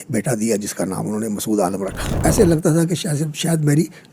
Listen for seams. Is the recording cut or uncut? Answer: cut